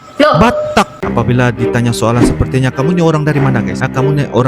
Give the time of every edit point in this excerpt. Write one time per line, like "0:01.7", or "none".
0:01.0